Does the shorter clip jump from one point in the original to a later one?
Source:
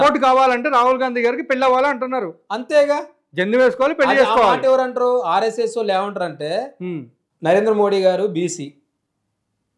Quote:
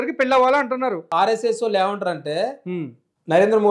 yes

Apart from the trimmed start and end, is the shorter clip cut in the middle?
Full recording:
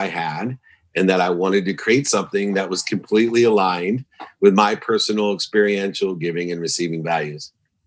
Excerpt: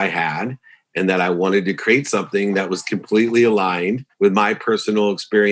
yes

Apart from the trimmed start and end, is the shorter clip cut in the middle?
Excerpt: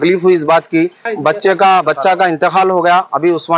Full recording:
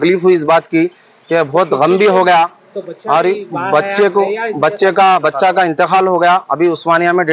yes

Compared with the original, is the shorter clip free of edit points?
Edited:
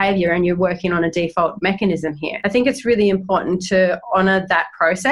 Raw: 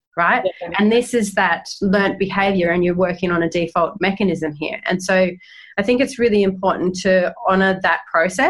no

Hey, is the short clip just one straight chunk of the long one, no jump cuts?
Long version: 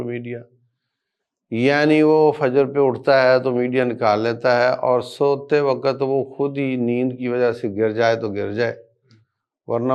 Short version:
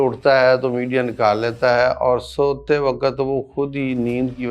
yes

